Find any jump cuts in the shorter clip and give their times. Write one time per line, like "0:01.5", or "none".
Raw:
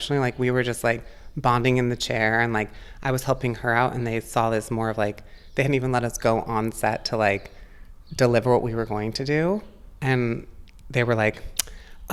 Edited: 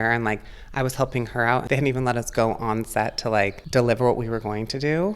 0:01.6
0:03.6

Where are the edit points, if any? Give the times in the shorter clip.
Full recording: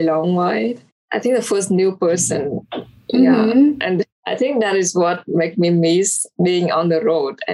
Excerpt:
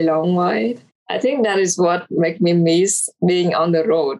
0:01.0

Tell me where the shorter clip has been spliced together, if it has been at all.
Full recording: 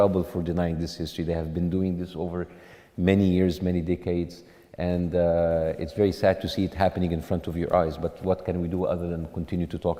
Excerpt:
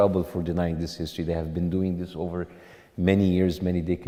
none

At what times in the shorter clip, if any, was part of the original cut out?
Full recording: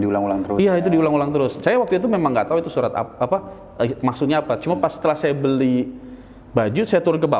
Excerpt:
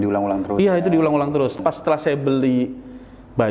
0:01.6

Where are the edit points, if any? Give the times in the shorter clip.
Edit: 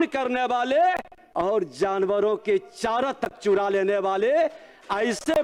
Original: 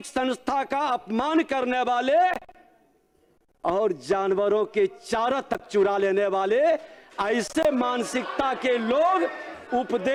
0:01.2

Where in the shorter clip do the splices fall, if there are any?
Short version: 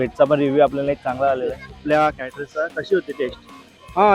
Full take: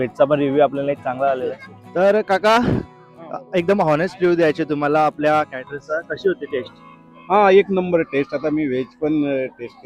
0:01.8

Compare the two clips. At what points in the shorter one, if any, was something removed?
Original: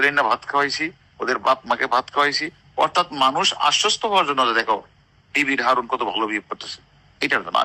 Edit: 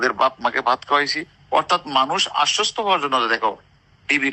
none

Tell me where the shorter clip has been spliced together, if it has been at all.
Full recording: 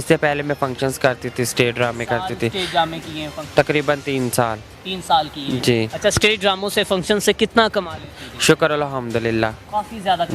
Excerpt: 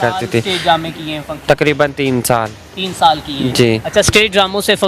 none

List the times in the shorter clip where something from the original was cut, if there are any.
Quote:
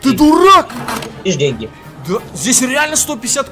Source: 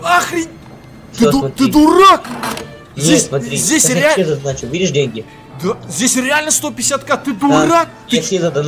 0:01.2

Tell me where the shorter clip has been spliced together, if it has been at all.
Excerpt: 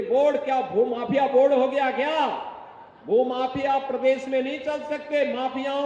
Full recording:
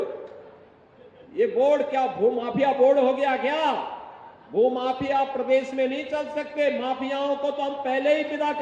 none

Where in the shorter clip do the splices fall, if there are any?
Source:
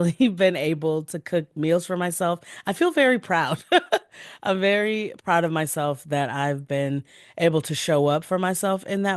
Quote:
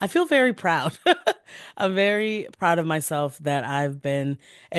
none

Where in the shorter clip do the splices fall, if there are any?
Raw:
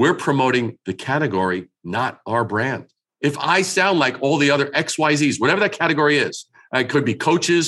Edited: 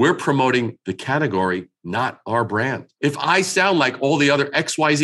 0:02.9

